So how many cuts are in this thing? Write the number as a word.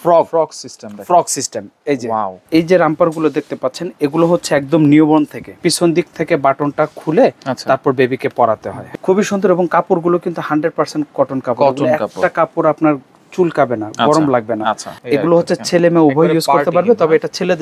four